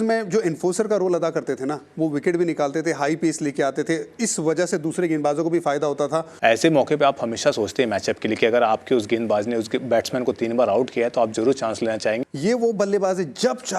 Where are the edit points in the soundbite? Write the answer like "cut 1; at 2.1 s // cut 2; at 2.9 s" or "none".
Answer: cut 1; at 6.3 s // cut 2; at 12.2 s